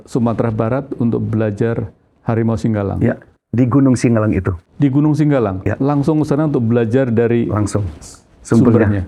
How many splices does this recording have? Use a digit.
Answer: 0